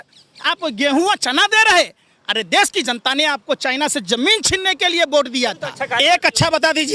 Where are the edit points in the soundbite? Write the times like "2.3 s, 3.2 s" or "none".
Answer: 5.8 s